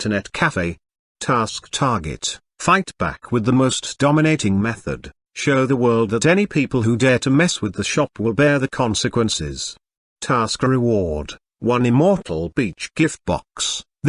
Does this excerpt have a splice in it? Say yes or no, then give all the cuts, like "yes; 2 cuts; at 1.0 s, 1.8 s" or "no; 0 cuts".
yes; 1 cut; at 0.9 s